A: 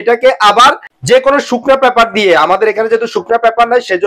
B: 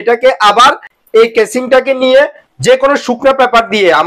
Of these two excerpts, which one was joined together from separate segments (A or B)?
A